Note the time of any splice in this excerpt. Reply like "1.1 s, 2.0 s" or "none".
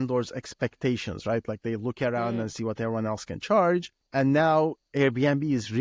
4.0 s